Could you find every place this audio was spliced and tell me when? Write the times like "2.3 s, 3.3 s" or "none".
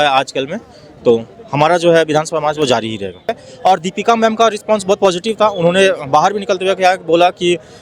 3.4 s